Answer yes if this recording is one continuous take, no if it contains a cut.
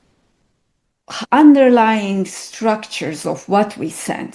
yes